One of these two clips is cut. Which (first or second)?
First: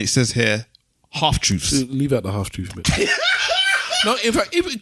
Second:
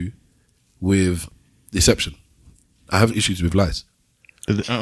second